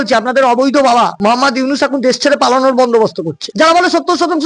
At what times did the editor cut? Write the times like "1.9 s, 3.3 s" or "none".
1.1 s, 3.4 s